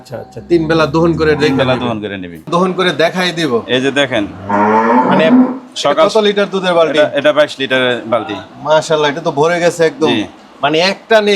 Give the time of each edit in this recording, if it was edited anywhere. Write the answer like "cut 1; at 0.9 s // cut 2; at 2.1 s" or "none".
cut 1; at 2.5 s

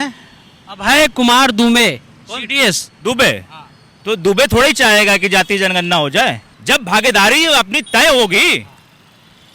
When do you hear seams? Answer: cut 1; at 6.5 s

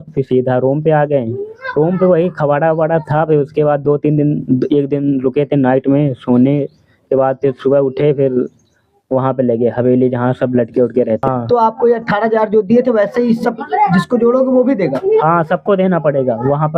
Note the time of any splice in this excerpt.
cut 1; at 11.2 s

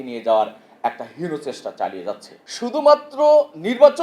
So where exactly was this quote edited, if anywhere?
cut 1; at 2.4 s

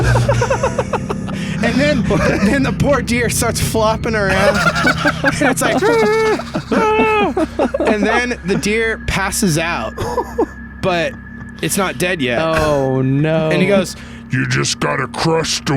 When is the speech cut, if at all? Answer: cut 1; at 13.5 s

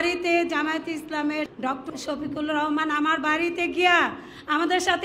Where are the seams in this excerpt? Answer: cut 1; at 1.5 s

